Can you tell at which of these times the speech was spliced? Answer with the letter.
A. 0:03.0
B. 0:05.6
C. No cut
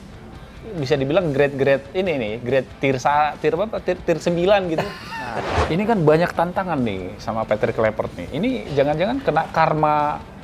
B